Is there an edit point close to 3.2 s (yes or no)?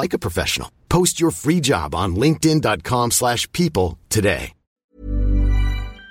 no